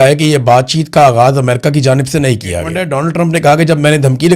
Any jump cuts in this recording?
yes; 1 cut; at 2.8 s

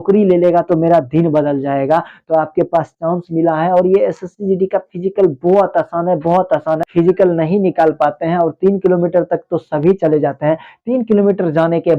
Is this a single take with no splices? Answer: no; 1 cut; at 6.7 s

